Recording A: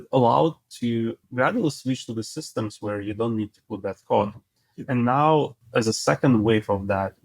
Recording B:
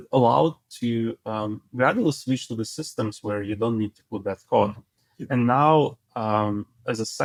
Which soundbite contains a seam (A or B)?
A